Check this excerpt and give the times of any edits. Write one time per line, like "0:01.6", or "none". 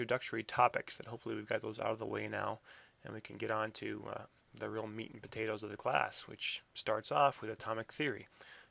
0:03.8